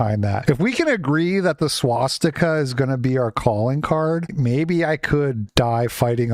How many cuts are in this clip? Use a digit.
1